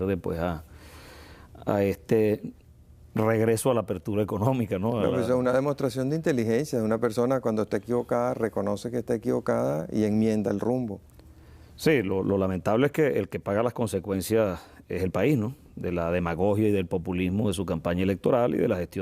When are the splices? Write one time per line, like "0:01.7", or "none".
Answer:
0:01.4